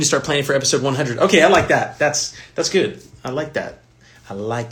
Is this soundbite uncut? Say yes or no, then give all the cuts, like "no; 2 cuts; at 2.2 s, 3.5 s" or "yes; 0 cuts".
yes; 0 cuts